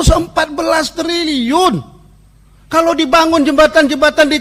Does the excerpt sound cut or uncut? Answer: uncut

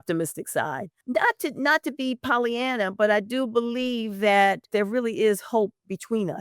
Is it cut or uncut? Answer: cut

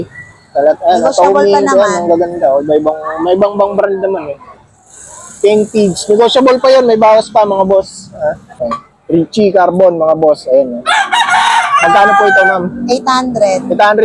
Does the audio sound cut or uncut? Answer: cut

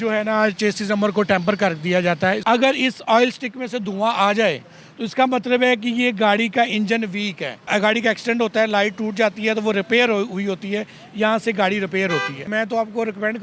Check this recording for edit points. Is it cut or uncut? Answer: cut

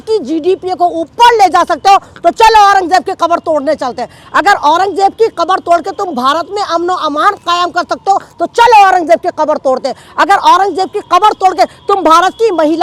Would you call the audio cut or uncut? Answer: uncut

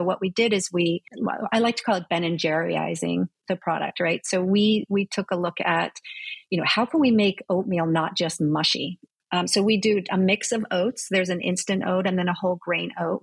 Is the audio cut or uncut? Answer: cut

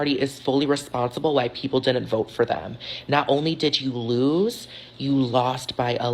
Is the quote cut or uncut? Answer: uncut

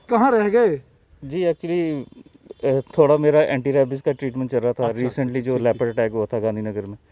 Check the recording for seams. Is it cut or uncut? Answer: uncut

